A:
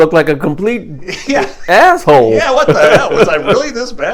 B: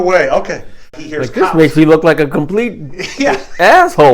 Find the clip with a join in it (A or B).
B